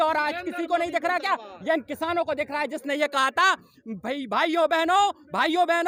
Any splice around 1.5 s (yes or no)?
no